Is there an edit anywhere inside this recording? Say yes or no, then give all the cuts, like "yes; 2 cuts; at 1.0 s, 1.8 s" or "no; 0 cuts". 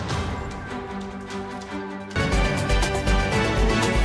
yes; 1 cut; at 2.0 s